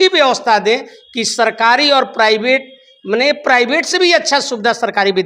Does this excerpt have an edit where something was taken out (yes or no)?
no